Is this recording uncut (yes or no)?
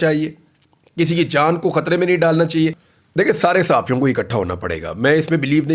no